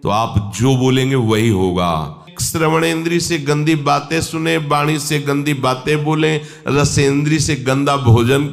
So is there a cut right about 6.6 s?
no; 1 cut; at 2.3 s

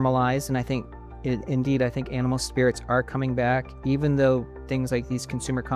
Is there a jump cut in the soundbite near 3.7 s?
no; 0 cuts

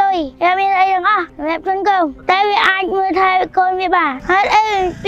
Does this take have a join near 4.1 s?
yes; 1 cut; at 4.1 s

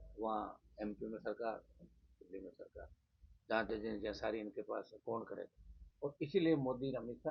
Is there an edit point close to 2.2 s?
no; 1 cut; at 5.8 s

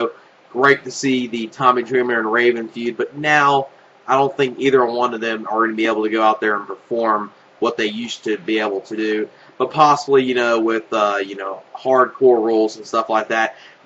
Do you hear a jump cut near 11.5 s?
yes; 1 cut; at 11.5 s

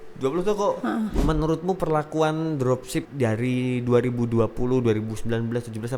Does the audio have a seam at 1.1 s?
yes; 2 cuts; at 1.1 s, 3.1 s

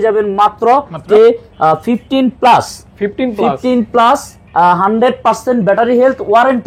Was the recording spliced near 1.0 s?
yes; 1 cut; at 1.0 s

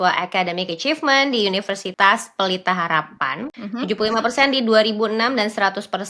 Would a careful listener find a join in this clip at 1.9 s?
yes; 2 cuts; at 1.9 s, 3.5 s

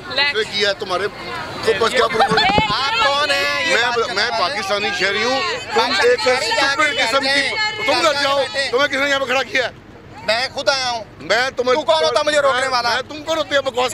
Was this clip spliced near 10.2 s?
no; 0 cuts

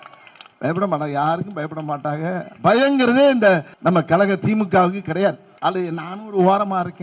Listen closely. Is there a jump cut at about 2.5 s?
no; 2 cuts; at 3.7 s, 5.5 s

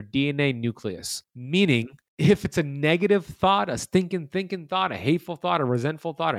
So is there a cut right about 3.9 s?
no; 1 cut; at 1.5 s

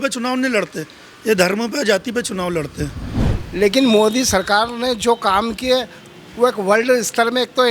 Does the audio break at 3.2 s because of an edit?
yes; 1 cut; at 3.2 s

